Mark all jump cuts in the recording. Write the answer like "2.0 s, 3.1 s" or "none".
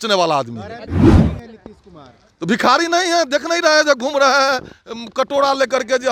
none